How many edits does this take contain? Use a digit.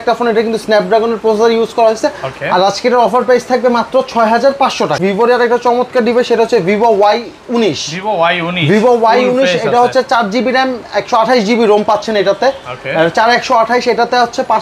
1